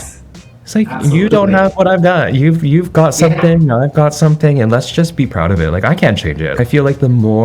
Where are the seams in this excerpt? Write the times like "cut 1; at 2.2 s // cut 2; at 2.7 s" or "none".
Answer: cut 1; at 6.5 s